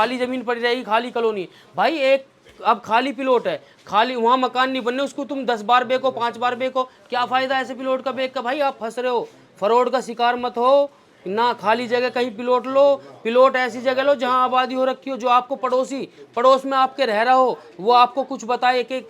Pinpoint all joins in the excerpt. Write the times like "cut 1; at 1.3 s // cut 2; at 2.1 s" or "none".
none